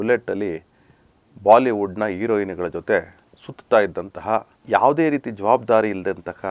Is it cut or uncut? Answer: cut